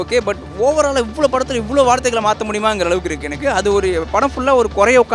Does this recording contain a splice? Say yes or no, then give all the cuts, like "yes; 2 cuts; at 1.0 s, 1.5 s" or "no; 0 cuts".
no; 0 cuts